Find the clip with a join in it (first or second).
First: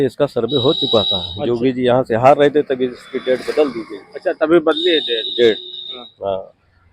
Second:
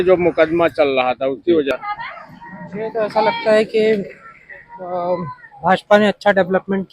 second